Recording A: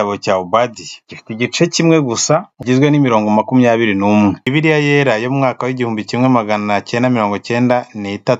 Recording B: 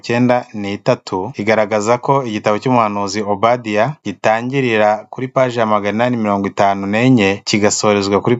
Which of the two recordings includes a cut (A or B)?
A